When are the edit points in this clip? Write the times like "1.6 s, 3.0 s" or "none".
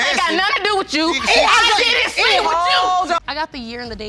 3.2 s